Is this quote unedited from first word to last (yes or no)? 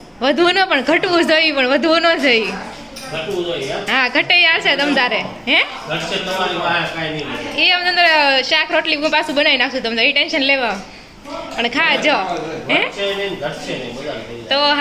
yes